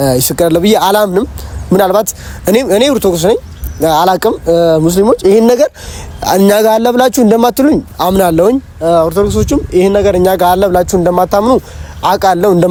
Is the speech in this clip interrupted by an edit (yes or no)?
no